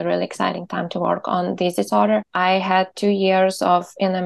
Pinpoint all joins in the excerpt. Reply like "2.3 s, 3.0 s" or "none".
2.3 s